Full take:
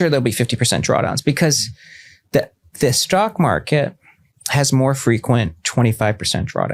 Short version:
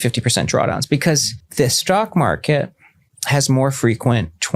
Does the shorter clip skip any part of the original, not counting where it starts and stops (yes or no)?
yes